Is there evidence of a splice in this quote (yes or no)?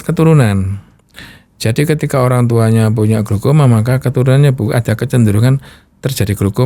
no